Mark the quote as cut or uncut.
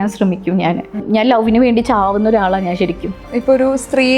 cut